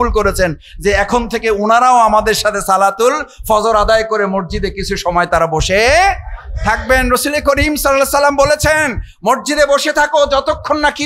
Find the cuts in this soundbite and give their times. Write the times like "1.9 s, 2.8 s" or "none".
none